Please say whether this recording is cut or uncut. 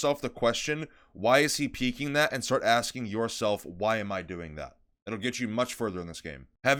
uncut